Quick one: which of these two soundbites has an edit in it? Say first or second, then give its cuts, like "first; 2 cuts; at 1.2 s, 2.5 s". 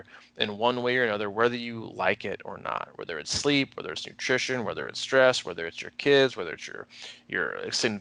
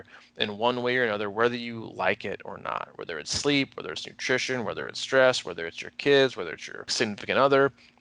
second; 1 cut; at 6.8 s